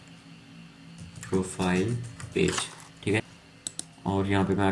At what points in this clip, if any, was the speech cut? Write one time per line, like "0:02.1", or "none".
0:03.2